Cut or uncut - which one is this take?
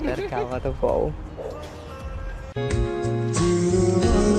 uncut